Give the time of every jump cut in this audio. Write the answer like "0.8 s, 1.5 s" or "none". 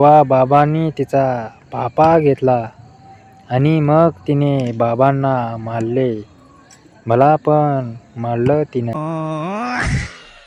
none